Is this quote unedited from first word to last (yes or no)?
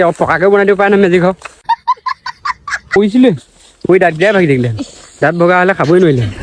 no